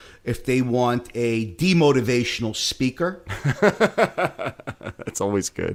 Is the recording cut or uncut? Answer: uncut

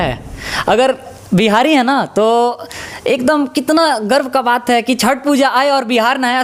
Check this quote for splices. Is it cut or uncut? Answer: uncut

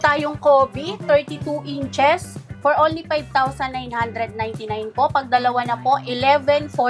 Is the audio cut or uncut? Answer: uncut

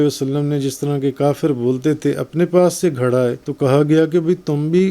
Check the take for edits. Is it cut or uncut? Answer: cut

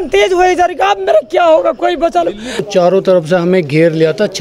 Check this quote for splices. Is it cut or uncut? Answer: cut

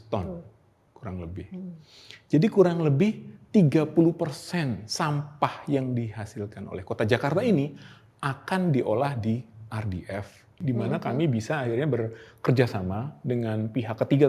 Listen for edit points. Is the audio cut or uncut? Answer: cut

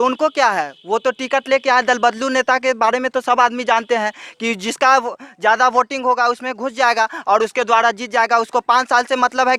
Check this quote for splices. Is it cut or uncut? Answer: uncut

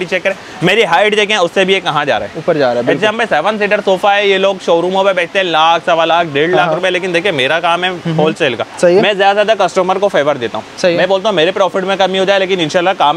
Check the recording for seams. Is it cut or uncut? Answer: uncut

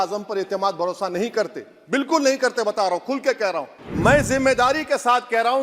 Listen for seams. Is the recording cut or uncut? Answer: cut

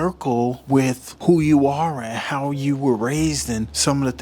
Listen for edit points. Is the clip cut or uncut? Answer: uncut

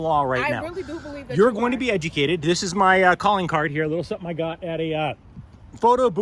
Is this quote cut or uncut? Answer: uncut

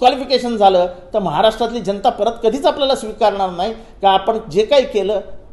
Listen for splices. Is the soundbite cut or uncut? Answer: uncut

